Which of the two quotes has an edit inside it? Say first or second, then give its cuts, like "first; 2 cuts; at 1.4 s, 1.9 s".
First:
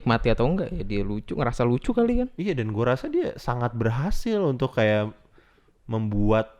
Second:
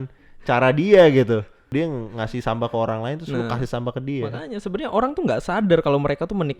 second; 1 cut; at 1.7 s